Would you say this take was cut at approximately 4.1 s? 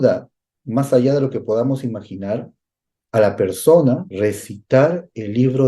yes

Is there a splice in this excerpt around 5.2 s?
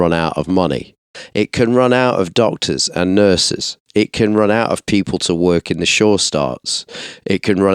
no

